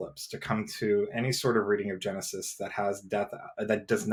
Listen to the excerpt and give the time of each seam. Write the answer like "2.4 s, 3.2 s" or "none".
none